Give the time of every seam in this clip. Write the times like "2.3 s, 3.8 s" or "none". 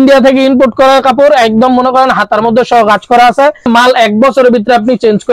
3.7 s